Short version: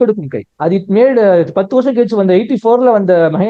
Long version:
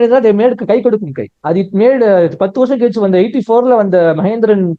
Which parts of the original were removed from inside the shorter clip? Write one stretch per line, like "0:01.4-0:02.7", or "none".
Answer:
none